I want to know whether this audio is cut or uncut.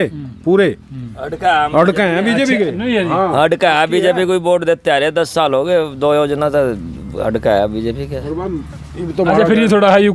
uncut